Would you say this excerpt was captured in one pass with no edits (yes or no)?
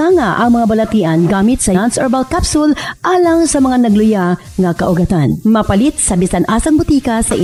yes